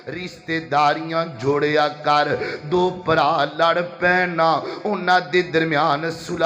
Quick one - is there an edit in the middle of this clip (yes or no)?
no